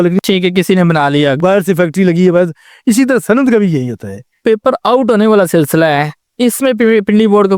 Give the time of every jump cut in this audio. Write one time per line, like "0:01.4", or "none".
0:04.4

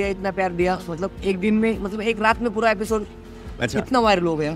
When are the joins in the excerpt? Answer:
none

